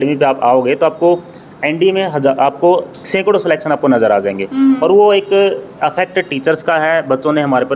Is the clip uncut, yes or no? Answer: yes